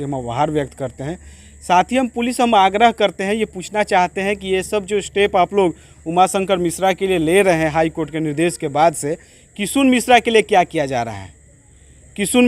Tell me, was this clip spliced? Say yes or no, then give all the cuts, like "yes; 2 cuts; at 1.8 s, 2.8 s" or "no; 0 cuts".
no; 0 cuts